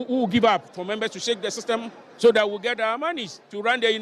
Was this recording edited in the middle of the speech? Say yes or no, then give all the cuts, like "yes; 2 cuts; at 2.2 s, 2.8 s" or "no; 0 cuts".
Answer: no; 0 cuts